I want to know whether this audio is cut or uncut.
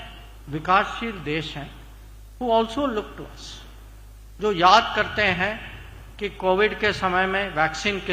uncut